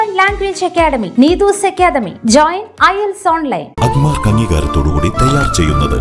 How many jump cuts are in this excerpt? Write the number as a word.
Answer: zero